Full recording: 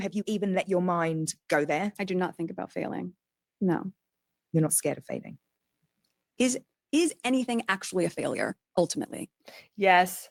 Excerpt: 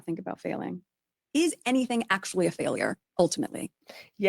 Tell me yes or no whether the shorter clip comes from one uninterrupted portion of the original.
no